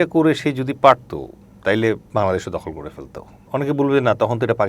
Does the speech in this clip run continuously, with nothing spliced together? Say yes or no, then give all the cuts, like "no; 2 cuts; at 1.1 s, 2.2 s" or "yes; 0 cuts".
no; 2 cuts; at 2.0 s, 3.4 s